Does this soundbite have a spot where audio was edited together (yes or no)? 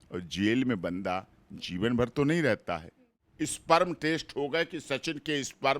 yes